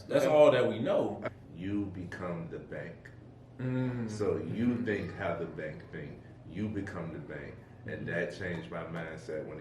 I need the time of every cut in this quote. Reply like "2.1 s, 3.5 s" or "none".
1.2 s